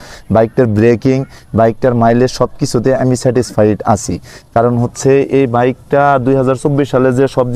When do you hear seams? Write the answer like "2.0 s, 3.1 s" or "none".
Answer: none